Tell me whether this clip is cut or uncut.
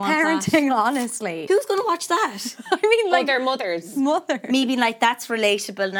cut